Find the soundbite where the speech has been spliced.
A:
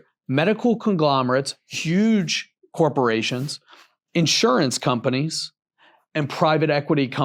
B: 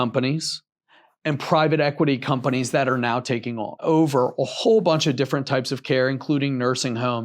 B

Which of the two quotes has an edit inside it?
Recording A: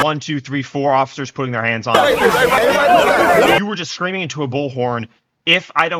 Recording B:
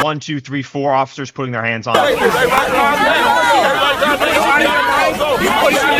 A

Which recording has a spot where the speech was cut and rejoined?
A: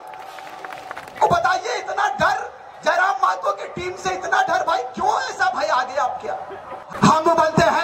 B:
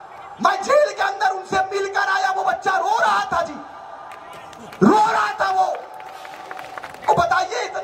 A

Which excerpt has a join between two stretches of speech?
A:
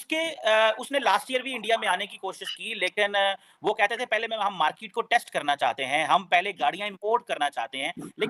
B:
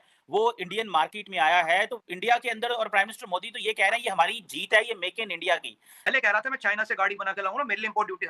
B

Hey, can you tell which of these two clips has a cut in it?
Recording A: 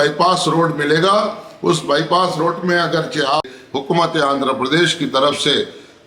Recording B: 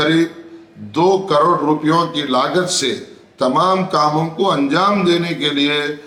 A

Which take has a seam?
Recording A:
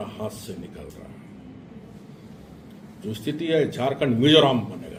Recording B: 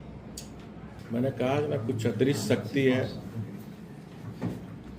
B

